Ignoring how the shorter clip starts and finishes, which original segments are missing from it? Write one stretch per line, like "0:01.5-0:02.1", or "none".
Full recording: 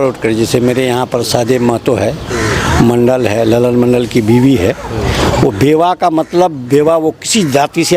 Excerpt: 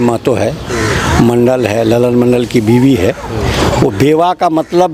none

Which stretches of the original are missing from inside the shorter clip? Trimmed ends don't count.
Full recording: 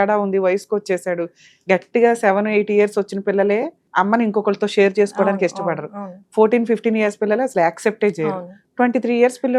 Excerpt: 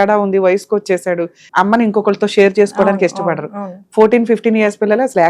0:01.4-0:03.8

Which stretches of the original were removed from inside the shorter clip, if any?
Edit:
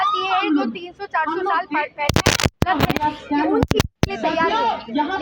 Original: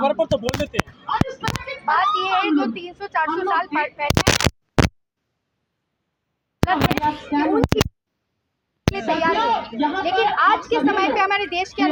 0:04.5-0:06.6
0:07.9-0:08.8

